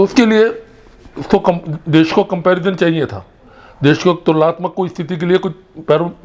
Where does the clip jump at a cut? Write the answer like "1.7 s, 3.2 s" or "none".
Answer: none